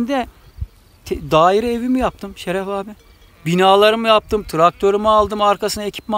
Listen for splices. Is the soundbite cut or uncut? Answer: uncut